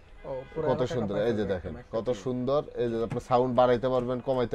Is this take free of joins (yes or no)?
yes